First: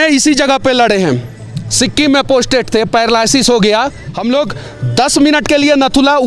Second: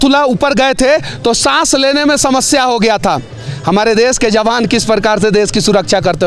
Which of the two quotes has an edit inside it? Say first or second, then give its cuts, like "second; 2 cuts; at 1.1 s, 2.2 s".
first; 1 cut; at 4.1 s